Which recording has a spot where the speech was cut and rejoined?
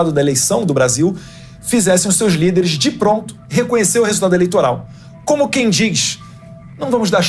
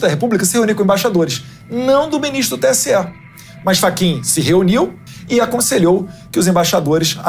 second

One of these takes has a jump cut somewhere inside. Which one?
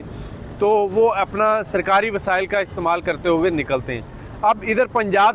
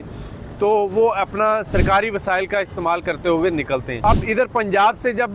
second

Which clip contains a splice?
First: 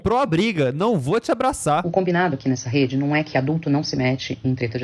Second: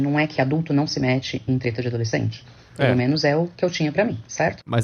first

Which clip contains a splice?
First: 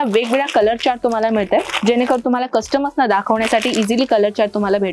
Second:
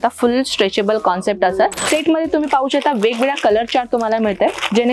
second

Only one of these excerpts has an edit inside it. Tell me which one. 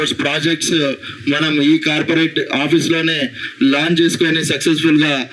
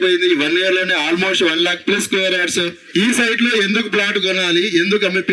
second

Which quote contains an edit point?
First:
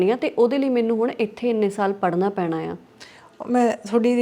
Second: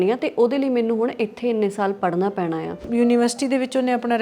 second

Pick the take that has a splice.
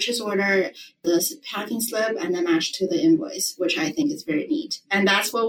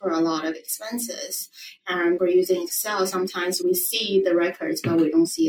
second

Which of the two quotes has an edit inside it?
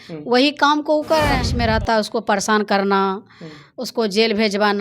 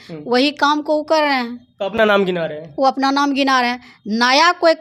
first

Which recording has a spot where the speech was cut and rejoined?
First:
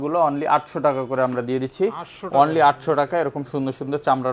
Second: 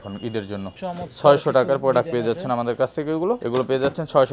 second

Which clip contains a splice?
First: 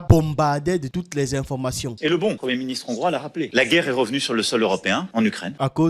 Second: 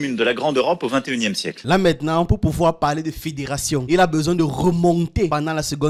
first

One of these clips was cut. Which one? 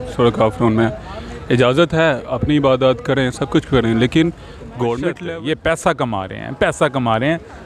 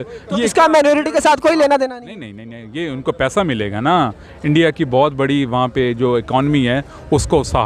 first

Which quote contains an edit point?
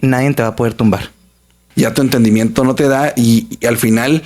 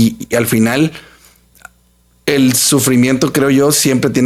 first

